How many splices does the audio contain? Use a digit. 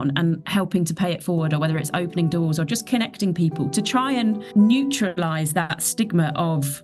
2